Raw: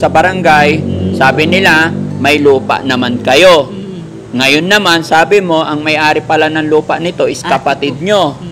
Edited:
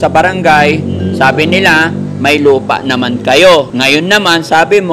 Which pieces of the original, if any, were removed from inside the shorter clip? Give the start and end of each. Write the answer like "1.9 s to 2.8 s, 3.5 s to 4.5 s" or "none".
3.7 s to 4.3 s